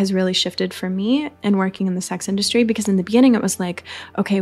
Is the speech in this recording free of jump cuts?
no; 1 cut; at 1.3 s

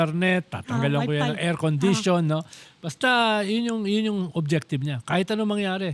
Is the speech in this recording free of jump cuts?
yes; 0 cuts

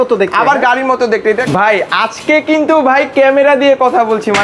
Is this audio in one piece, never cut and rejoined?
no; 1 cut; at 1.4 s

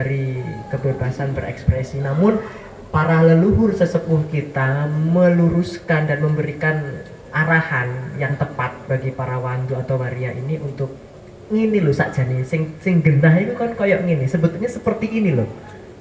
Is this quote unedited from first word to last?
yes; 0 cuts

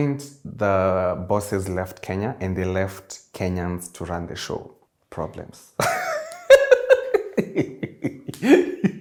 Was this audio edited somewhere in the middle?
no; 0 cuts

